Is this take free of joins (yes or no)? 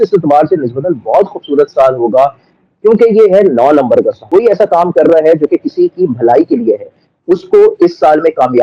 no